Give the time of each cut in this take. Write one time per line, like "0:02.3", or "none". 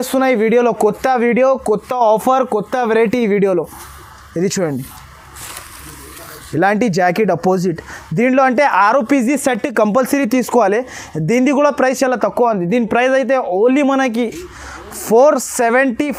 none